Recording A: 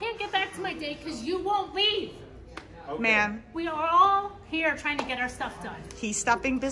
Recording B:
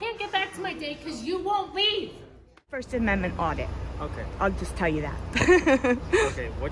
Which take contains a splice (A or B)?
B